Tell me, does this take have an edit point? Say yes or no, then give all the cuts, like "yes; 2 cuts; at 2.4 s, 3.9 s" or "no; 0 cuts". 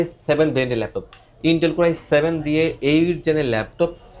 no; 0 cuts